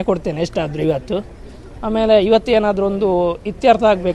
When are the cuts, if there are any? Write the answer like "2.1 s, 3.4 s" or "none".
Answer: none